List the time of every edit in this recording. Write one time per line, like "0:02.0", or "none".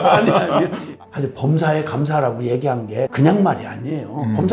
0:00.9
0:03.1